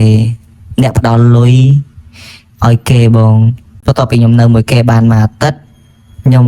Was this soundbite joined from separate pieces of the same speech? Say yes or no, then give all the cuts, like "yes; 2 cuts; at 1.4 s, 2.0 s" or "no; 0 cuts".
yes; 1 cut; at 3.6 s